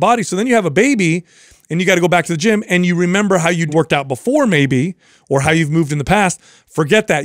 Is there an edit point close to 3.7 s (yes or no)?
yes